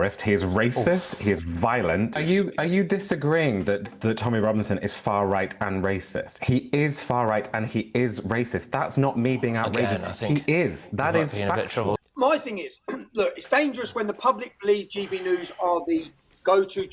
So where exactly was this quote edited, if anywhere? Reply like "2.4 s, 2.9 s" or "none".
2.1 s, 11.9 s